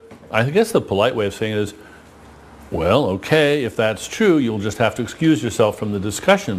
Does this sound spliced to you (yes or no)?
no